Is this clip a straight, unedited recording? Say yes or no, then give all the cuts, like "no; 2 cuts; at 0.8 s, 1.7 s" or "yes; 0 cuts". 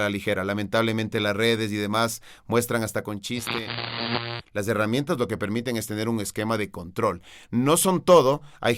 no; 1 cut; at 4.1 s